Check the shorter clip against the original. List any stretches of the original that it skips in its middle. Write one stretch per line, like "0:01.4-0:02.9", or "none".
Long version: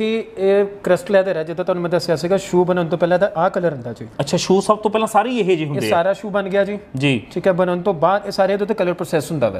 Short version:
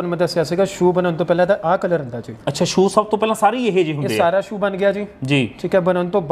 none